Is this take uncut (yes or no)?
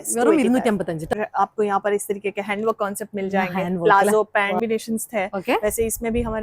no